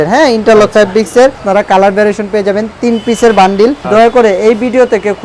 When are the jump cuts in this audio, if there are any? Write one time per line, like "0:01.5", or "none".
0:01.4
0:03.9

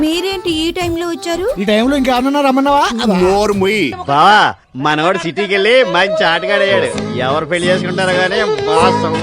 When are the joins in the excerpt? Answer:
0:04.0

